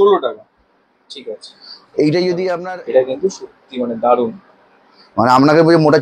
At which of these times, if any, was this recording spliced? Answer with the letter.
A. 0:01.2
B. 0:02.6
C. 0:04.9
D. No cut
B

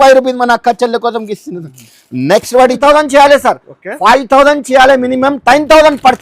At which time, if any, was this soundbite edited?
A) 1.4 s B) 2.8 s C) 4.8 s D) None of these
B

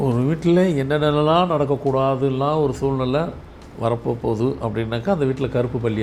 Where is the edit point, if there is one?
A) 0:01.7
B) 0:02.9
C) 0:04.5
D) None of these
D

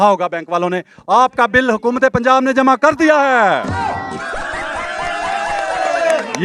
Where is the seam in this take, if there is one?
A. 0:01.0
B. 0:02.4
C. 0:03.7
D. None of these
D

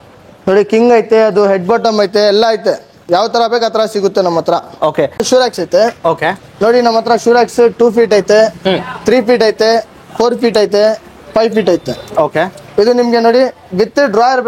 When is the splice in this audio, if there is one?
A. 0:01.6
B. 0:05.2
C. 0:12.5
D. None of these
B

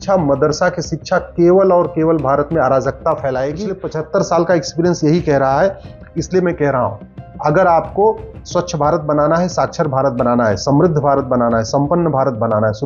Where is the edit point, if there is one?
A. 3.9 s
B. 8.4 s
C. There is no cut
A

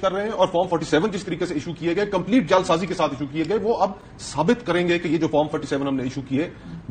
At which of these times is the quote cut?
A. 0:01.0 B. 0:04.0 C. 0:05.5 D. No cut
D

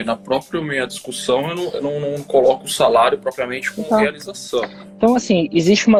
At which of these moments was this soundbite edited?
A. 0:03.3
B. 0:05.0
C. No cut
C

